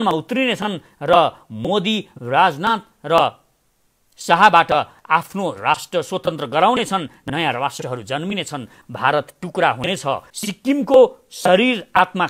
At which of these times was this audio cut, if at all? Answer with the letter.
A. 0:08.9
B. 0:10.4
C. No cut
B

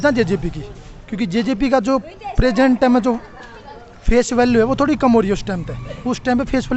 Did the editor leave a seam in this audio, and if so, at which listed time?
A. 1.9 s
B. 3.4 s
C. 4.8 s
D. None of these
D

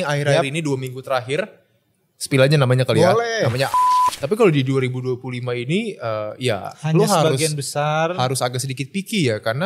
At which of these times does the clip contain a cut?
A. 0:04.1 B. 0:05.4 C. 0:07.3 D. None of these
A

